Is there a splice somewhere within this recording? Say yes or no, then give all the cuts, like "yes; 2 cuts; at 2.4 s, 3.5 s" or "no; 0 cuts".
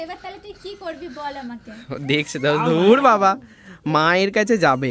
no; 0 cuts